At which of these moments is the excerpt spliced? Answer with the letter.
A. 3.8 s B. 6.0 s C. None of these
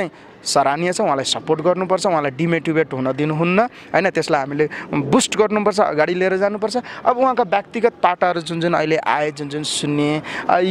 C